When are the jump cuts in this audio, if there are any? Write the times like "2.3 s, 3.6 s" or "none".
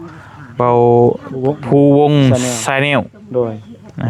none